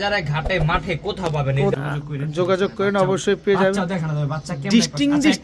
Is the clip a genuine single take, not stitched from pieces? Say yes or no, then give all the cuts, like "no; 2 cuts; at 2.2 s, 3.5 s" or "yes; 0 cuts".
no; 1 cut; at 1.8 s